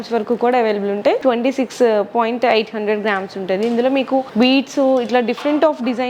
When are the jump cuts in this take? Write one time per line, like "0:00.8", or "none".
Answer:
0:01.2
0:04.3